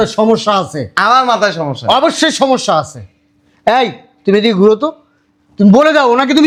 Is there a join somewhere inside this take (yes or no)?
no